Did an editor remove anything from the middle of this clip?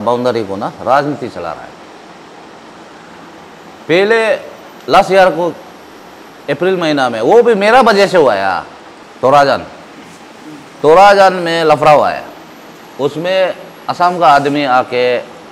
no; 0 cuts

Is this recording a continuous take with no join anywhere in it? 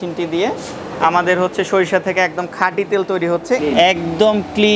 no; 1 cut; at 3.6 s

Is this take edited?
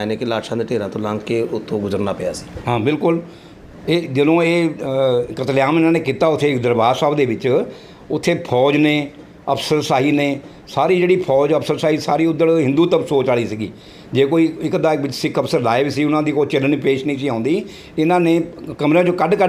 no; 0 cuts

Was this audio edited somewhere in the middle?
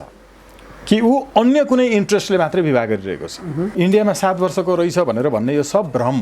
yes; 1 cut; at 3.7 s

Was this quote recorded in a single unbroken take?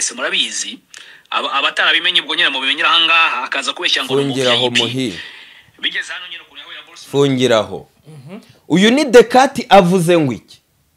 yes; 0 cuts

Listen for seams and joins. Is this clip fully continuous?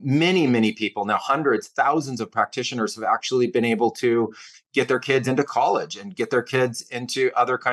yes; 0 cuts

